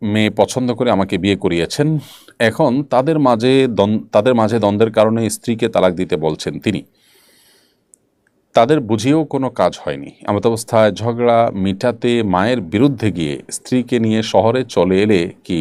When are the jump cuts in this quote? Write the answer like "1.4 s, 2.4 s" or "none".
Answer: none